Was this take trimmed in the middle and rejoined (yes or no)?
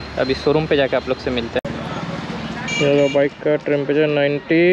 yes